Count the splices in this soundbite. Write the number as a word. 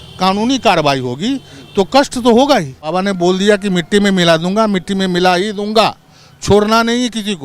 one